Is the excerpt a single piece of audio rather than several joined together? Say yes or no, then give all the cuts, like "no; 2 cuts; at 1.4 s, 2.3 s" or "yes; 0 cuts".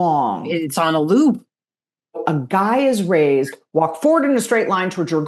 no; 1 cut; at 2.2 s